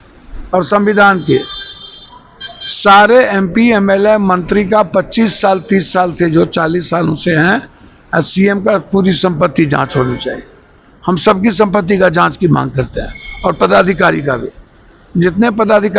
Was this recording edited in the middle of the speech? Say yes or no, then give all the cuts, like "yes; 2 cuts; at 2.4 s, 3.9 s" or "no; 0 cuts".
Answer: no; 0 cuts